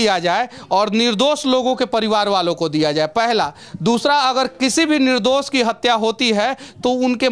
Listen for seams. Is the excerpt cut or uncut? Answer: uncut